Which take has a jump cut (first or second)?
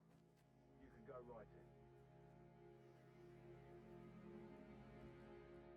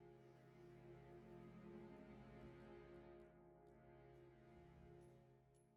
first